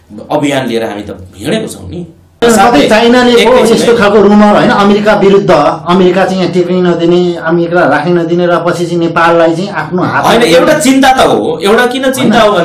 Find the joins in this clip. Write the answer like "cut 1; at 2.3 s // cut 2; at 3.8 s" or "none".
cut 1; at 2.4 s